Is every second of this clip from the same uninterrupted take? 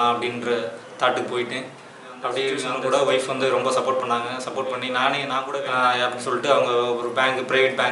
no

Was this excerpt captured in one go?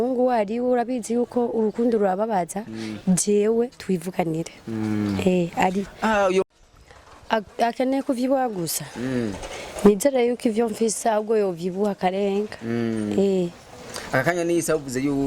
no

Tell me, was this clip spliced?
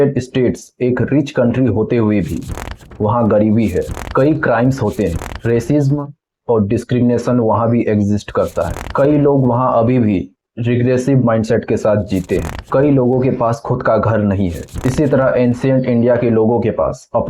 no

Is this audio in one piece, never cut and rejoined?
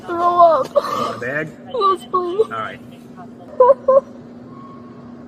yes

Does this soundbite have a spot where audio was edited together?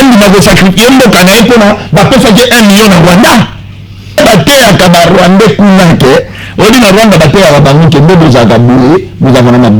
yes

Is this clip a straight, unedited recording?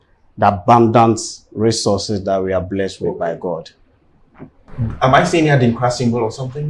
yes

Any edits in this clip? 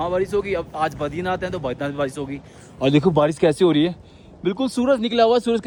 no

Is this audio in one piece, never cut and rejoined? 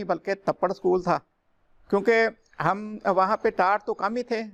yes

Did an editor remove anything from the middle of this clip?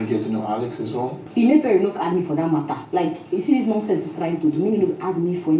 no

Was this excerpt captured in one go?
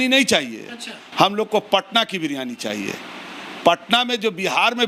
yes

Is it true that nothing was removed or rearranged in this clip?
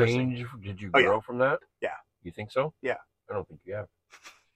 yes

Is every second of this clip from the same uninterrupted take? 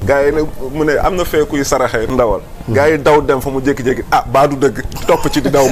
yes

